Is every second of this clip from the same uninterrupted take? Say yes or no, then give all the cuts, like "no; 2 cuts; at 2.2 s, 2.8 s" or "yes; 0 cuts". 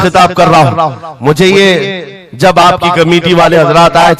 yes; 0 cuts